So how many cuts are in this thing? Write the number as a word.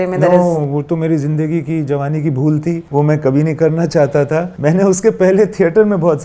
two